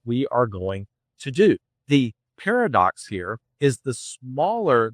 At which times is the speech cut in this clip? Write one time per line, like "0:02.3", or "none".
0:01.7
0:03.4